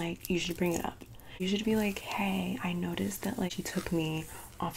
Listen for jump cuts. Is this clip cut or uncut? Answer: cut